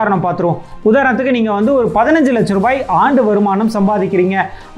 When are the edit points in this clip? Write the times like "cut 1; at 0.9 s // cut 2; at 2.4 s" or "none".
none